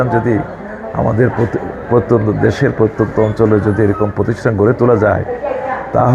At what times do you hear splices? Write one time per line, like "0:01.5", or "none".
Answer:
none